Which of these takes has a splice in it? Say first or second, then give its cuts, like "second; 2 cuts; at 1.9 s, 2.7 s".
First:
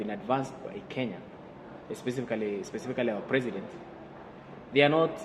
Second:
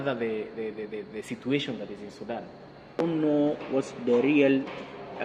second; 1 cut; at 3.0 s